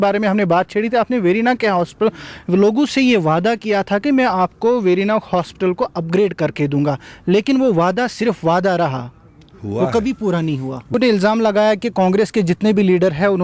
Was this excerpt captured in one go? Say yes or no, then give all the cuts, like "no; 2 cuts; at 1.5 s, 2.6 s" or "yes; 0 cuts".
no; 1 cut; at 10.9 s